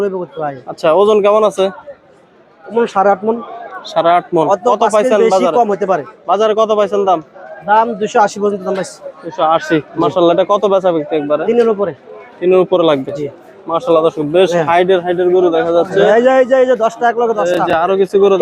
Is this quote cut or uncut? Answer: uncut